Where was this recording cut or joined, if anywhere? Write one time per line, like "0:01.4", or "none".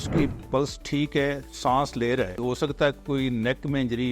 0:01.5
0:02.4